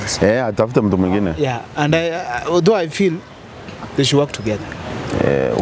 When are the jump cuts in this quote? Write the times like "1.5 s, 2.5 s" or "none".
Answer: none